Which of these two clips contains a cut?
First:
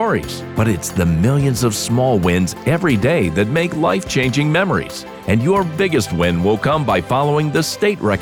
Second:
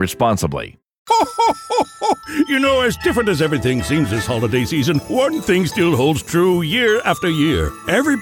second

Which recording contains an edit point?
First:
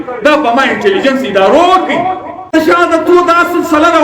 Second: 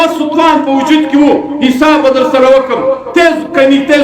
first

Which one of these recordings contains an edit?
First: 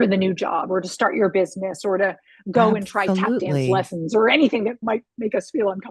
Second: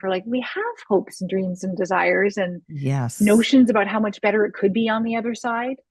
first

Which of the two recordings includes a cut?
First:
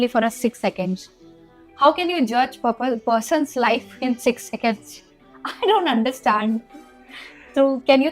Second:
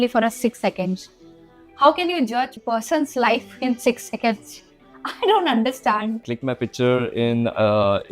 second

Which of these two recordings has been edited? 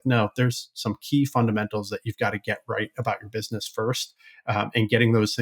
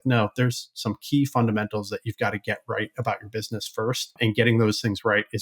second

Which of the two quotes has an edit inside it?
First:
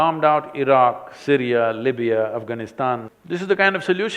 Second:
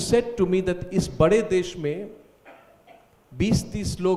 first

